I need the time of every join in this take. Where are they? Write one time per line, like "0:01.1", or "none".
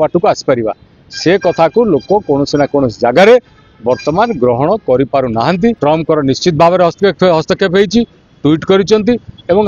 0:05.8